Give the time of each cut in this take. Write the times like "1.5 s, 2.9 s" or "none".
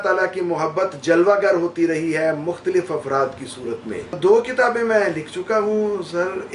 4.2 s